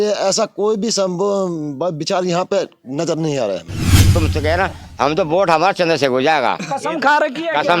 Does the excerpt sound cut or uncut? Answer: cut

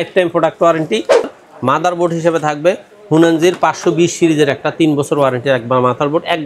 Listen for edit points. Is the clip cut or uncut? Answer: cut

